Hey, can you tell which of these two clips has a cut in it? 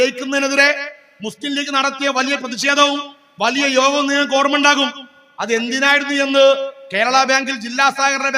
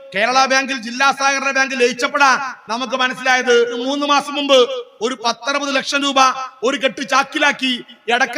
second; 1 cut; at 3.8 s

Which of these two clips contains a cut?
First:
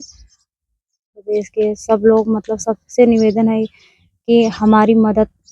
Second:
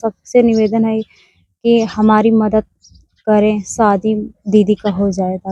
first; 1 cut; at 1.1 s

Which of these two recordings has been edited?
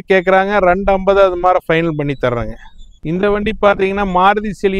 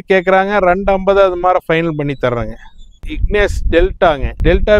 second; 1 cut; at 3.0 s

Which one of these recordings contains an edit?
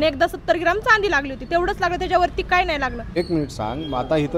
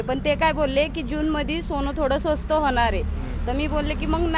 first; 1 cut; at 3.1 s

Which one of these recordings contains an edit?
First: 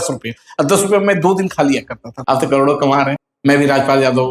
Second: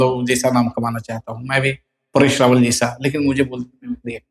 first; 2 cuts; at 2.1 s, 3.3 s

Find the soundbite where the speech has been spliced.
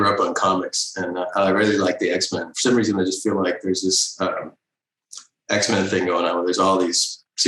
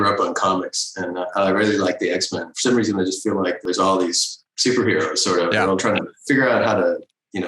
second; 1 cut; at 3.7 s

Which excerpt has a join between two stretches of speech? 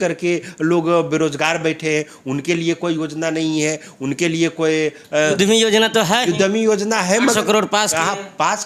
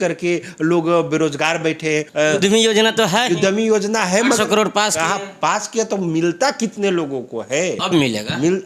second; 1 cut; at 2.1 s

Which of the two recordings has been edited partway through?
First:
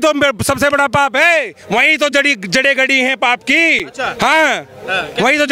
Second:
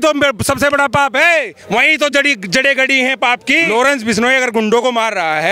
second; 1 cut; at 3.7 s

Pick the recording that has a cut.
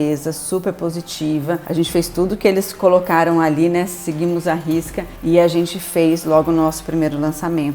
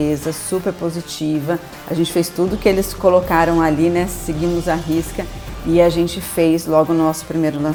first; 2 cuts; at 1.6 s, 5.0 s

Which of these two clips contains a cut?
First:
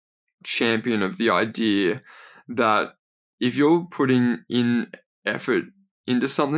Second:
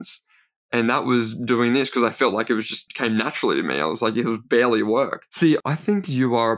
second; 2 cuts; at 2.9 s, 5.1 s

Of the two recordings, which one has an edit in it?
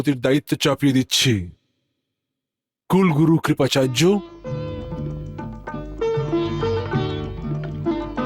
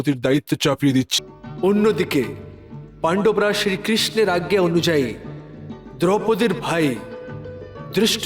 second; 1 cut; at 1.1 s

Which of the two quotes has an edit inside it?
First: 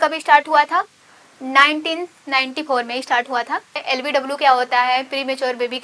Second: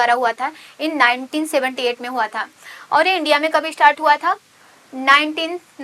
first; 1 cut; at 3.8 s

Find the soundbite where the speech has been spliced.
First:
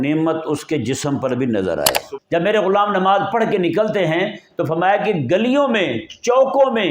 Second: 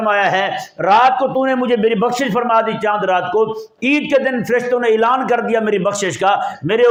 first; 1 cut; at 2.1 s

